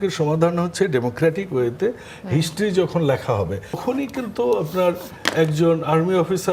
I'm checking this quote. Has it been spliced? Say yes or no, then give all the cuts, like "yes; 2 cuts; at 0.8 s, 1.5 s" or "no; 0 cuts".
yes; 1 cut; at 3.8 s